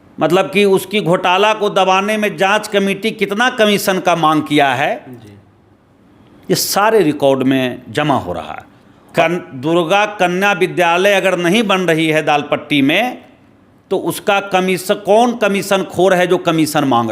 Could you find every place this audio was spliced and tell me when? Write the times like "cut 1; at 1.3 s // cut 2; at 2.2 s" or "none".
cut 1; at 9.1 s